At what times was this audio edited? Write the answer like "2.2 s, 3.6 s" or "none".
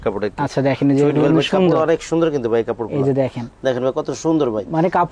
none